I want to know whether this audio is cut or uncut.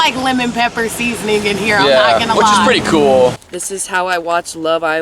cut